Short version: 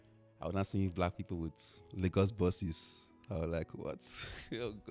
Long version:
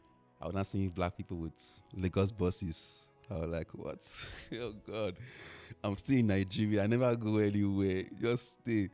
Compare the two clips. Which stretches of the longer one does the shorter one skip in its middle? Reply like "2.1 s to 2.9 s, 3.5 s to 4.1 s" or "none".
none